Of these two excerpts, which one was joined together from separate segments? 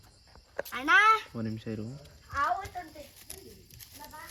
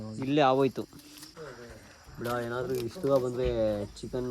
second; 1 cut; at 1.4 s

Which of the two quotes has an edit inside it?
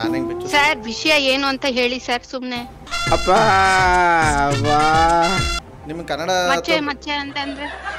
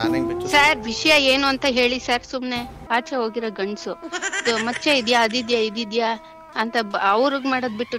second; 1 cut; at 2.8 s

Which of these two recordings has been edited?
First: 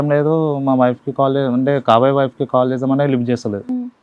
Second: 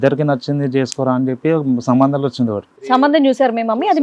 second; 1 cut; at 2.7 s

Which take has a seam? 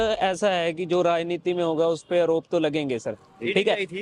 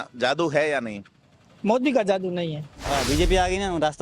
second; 1 cut; at 2.8 s

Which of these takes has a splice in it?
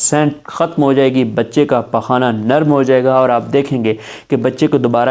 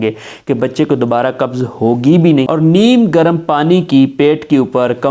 second; 1 cut; at 2.5 s

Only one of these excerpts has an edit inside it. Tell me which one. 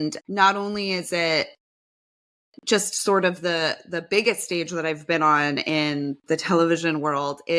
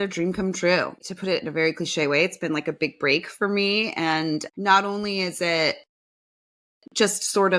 second; 1 cut; at 1.0 s

